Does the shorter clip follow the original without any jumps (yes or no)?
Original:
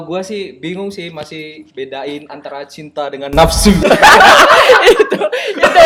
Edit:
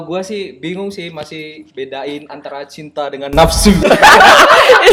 yes